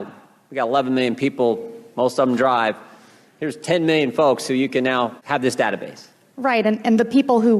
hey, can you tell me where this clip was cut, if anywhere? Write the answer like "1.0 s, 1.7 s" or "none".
5.2 s